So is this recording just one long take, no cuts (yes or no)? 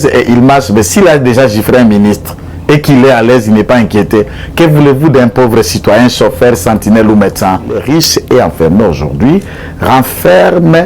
no